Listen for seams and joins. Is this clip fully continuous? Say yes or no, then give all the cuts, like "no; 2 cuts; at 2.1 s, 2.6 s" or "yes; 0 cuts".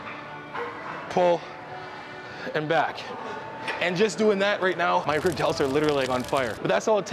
yes; 0 cuts